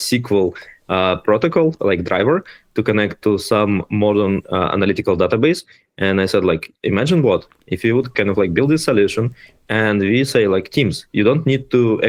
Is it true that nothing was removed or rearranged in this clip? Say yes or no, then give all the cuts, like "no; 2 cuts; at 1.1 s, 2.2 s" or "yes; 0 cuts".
yes; 0 cuts